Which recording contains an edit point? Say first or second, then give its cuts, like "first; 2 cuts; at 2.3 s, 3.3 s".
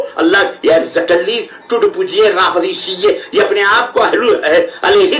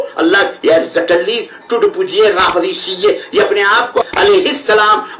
second; 1 cut; at 4.0 s